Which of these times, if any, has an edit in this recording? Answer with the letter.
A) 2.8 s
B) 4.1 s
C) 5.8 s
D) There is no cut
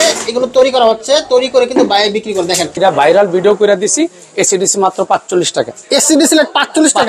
A